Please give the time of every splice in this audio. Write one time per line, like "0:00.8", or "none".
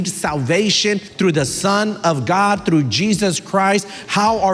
0:01.1